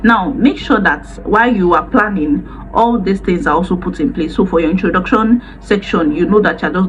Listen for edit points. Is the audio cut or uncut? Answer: uncut